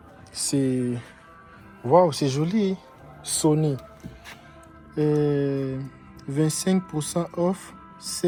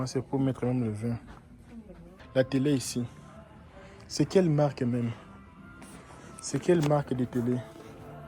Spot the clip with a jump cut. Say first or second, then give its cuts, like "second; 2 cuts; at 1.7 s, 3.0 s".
second; 1 cut; at 2.1 s